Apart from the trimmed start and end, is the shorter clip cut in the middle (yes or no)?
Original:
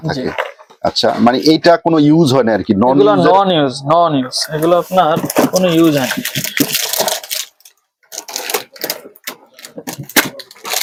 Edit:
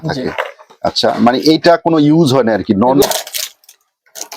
yes